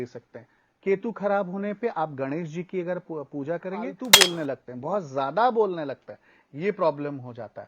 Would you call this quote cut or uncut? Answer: cut